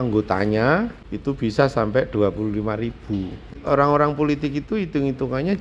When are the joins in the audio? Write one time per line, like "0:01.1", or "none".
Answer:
0:01.0
0:03.6